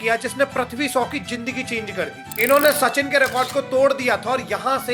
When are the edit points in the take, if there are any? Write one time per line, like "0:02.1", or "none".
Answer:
0:02.2